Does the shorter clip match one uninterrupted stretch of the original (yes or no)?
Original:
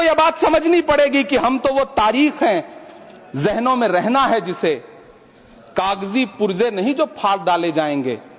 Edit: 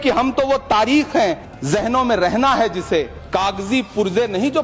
no